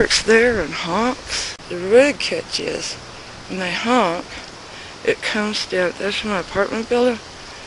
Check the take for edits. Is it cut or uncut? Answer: uncut